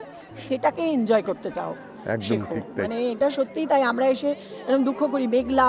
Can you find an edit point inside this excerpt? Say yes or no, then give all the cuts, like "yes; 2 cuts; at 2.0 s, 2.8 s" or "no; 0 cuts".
no; 0 cuts